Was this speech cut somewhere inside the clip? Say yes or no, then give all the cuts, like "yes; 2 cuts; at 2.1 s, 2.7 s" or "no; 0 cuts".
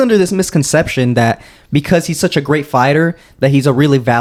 no; 0 cuts